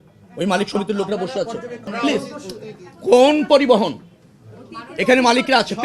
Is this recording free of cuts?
no; 1 cut; at 1.9 s

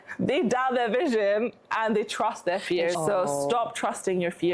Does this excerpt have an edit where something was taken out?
yes; 1 cut; at 3.0 s

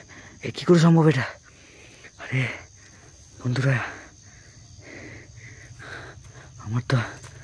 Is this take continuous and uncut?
yes; 0 cuts

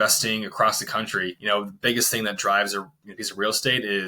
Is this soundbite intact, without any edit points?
no; 1 cut; at 1.3 s

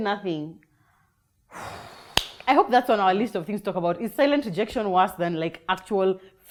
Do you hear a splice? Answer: no; 0 cuts

